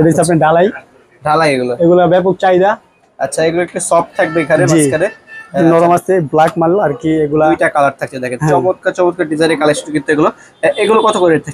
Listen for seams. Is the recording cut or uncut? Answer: uncut